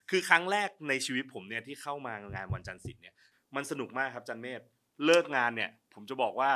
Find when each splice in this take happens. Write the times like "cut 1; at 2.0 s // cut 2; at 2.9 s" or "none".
cut 1; at 3.3 s